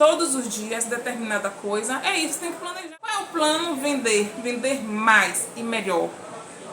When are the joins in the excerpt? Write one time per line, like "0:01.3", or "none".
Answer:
0:02.7